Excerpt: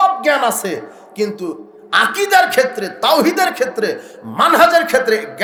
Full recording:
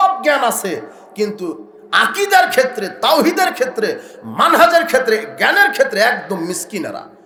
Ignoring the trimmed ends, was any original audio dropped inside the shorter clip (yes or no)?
no